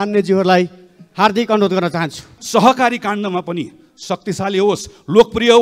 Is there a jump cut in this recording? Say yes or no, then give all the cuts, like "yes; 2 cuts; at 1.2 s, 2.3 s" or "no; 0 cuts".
yes; 1 cut; at 2.3 s